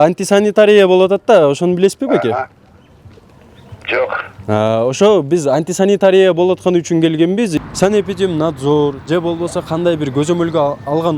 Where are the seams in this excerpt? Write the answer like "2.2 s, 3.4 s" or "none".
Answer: 7.5 s